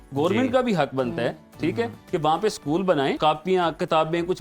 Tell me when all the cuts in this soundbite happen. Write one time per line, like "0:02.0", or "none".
0:03.2